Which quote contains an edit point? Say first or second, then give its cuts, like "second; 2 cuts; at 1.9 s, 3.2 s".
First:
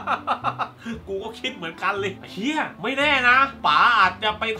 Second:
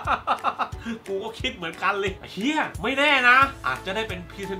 second; 1 cut; at 3.6 s